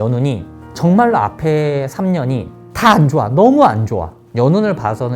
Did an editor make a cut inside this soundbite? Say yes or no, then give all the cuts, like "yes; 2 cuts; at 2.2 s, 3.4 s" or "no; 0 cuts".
yes; 1 cut; at 4.2 s